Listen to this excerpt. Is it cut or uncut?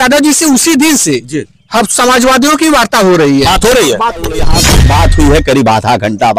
cut